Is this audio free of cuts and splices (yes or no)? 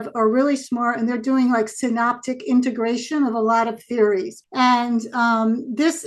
no